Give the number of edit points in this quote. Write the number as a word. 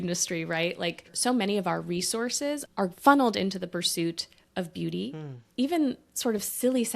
three